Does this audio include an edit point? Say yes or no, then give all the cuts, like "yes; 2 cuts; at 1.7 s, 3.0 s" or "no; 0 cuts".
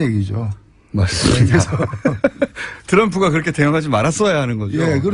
yes; 1 cut; at 2.7 s